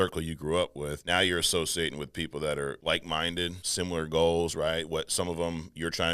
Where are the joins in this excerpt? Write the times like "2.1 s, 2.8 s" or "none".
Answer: 1.0 s, 2.8 s, 3.6 s